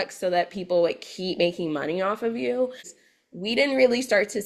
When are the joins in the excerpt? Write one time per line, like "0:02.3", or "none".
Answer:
0:02.8